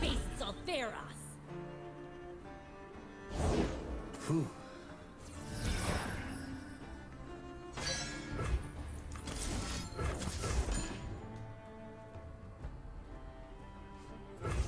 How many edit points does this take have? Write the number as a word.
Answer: zero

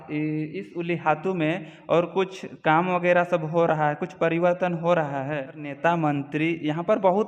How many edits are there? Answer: one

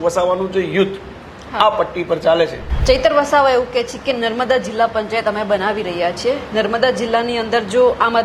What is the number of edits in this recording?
one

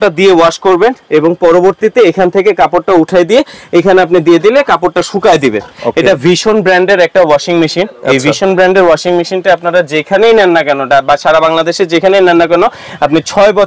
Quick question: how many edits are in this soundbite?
one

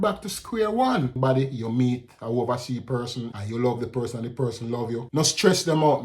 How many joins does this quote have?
three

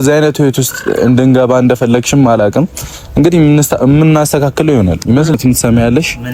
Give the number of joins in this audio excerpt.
one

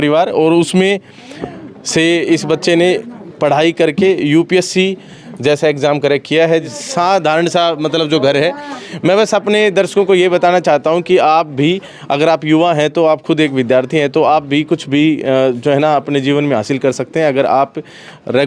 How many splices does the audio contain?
one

